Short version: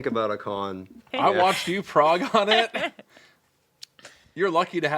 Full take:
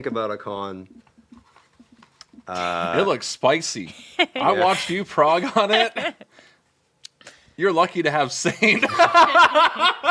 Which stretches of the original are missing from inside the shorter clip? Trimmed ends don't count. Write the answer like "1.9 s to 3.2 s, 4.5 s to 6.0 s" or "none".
1.1 s to 4.3 s